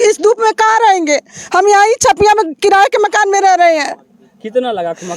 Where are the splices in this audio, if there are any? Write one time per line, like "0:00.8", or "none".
none